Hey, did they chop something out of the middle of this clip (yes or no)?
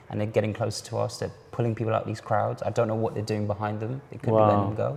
no